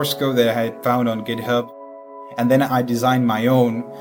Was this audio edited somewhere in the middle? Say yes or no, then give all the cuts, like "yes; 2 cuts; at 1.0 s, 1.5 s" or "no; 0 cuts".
yes; 1 cut; at 1.7 s